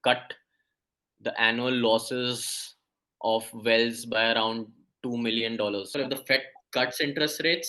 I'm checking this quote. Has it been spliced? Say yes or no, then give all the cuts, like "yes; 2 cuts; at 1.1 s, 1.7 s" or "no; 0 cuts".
yes; 1 cut; at 5.9 s